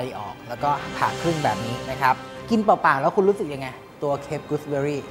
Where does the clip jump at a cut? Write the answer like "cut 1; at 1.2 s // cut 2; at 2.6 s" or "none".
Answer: cut 1; at 2.3 s